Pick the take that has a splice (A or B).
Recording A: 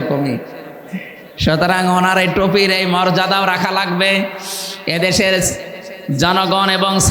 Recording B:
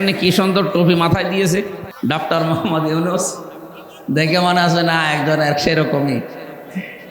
B